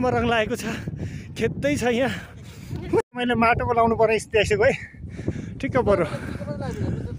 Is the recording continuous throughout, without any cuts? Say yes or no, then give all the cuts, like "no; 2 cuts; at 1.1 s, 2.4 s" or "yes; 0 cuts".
yes; 0 cuts